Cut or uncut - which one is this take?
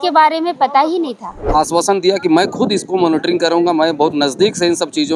cut